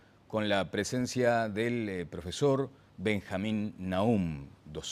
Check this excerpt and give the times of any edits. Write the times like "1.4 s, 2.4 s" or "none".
none

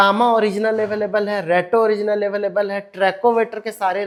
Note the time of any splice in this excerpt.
none

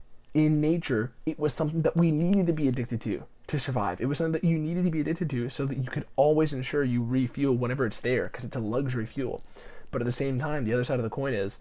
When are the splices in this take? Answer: none

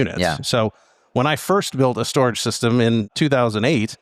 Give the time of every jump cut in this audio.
3.1 s

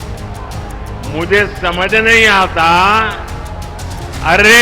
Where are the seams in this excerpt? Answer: 1.1 s

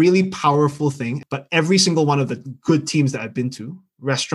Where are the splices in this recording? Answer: 1.1 s

